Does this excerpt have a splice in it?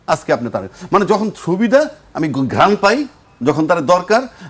no; 0 cuts

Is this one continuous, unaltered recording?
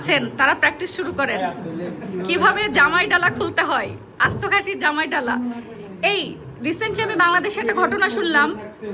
yes; 0 cuts

